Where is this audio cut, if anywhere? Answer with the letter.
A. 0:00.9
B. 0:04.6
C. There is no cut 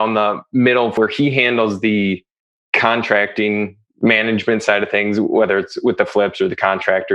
A